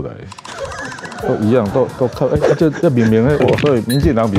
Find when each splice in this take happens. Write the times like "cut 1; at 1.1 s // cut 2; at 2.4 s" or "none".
cut 1; at 3.4 s

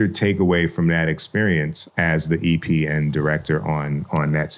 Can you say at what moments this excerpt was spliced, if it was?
none

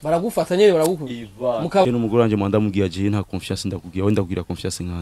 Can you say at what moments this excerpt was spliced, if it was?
cut 1; at 1.8 s

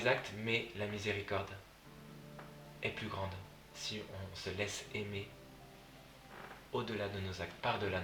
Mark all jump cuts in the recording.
none

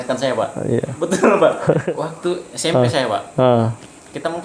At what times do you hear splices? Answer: cut 1; at 1.8 s

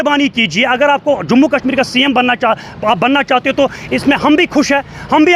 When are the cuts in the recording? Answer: none

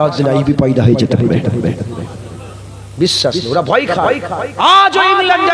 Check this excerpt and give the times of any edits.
none

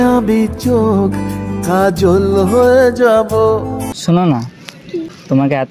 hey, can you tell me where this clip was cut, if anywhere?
cut 1; at 3.9 s

